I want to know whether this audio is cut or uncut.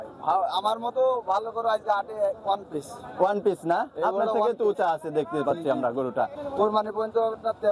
cut